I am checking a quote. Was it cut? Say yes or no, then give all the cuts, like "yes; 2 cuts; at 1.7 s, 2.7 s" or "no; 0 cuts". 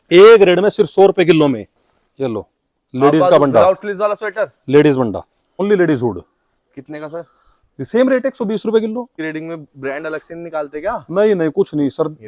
yes; 2 cuts; at 5.6 s, 9.2 s